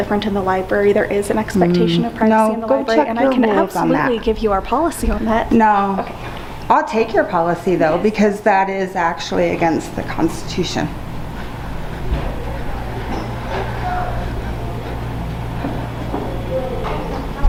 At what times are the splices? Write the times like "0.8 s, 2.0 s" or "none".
none